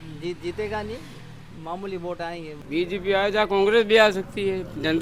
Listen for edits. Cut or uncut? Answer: cut